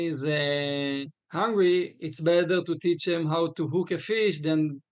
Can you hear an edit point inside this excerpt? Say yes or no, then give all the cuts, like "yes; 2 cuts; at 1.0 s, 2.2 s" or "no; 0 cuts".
yes; 1 cut; at 1.2 s